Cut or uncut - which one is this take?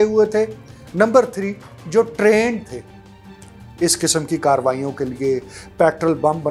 uncut